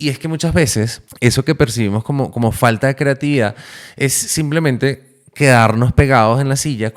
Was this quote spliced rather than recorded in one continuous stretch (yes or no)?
yes